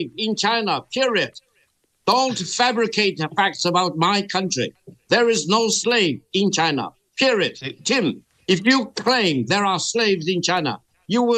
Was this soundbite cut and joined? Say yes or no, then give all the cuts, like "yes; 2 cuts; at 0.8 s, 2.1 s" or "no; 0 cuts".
no; 0 cuts